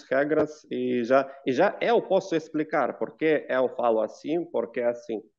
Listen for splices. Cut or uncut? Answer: uncut